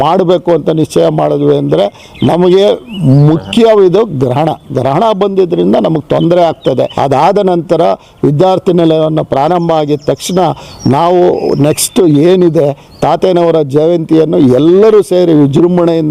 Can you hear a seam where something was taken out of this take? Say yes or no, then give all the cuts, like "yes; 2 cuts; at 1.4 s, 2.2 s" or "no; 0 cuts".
yes; 1 cut; at 6.9 s